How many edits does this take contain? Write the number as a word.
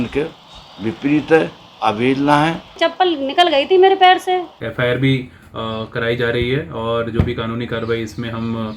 one